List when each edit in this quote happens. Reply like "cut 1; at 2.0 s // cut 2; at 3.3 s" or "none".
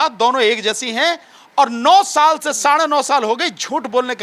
none